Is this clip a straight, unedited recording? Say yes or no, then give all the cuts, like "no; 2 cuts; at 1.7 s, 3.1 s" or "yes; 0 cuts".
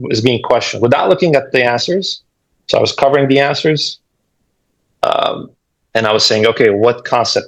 yes; 0 cuts